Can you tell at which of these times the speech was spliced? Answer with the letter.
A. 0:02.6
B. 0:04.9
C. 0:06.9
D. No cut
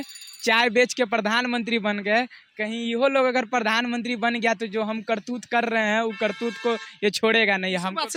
D